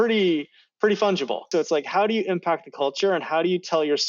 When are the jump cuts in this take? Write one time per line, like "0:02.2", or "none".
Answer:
0:01.5